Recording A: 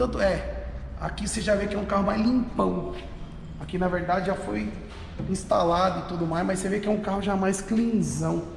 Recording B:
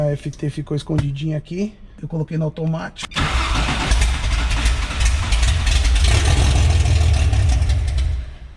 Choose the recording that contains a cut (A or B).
B